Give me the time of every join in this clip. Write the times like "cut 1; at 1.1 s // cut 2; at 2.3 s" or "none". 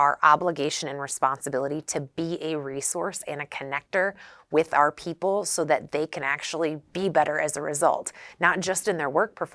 none

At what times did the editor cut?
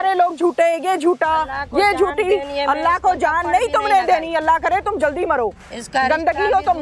none

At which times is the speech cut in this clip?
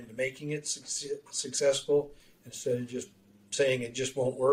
none

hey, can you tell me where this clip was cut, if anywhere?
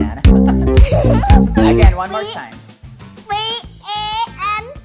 cut 1; at 1.9 s

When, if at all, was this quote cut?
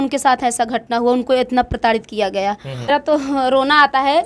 cut 1; at 2.9 s

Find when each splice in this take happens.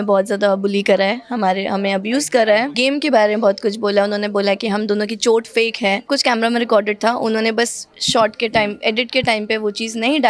cut 1; at 2.7 s // cut 2; at 6.1 s

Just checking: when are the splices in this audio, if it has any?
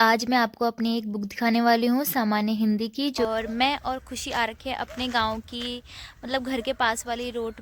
cut 1; at 3.3 s

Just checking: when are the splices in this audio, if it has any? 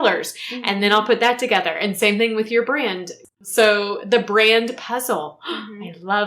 cut 1; at 3.3 s

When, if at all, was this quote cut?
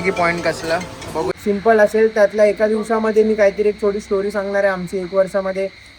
cut 1; at 1.3 s

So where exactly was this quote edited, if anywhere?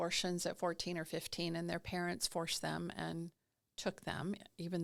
none

